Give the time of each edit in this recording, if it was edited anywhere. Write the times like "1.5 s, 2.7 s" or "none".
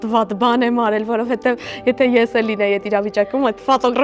none